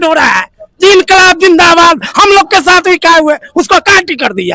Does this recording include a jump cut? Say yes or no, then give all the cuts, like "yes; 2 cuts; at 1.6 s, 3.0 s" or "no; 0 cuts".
no; 0 cuts